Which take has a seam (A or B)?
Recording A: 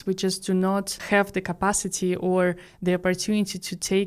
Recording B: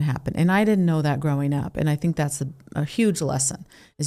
A